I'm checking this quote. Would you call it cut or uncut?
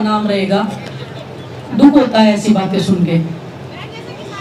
uncut